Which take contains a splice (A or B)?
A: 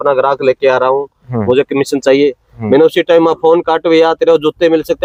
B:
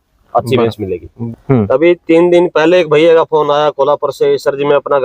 B